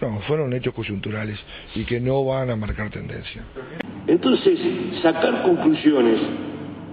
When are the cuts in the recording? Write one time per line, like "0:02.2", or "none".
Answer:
0:03.6